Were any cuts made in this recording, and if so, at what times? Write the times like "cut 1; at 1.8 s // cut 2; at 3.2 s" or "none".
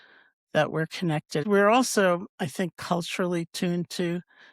cut 1; at 1.4 s